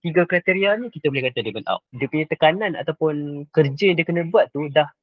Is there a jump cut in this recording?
yes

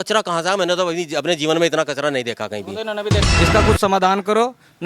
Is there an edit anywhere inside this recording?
yes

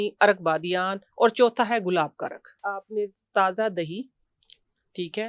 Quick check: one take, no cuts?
no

